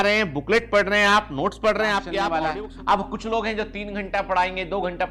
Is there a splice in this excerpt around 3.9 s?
no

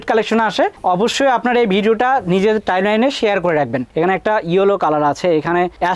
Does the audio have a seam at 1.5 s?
no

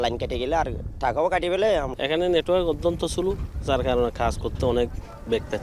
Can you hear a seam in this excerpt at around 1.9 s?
yes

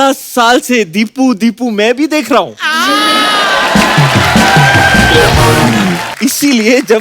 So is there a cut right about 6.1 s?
yes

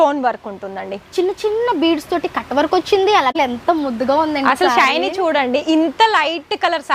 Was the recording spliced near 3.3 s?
yes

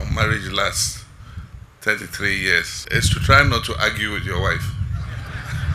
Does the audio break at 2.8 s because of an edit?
yes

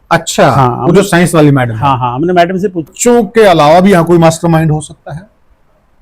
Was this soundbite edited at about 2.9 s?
yes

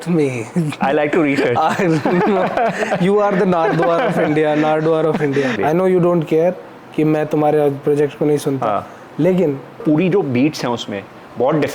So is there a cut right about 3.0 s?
no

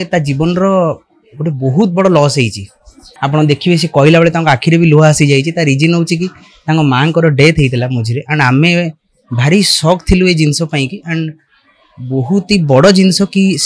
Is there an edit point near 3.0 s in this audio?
yes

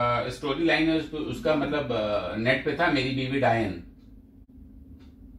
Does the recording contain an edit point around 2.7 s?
no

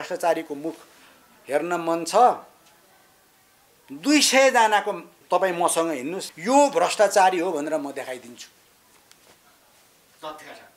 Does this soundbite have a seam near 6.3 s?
yes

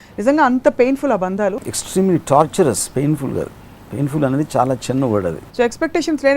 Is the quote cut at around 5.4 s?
yes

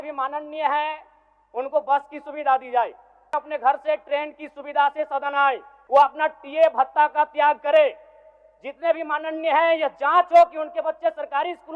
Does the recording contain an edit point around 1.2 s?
no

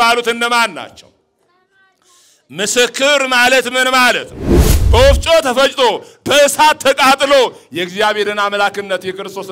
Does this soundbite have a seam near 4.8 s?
yes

